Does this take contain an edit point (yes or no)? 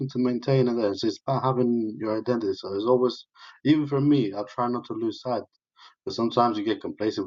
no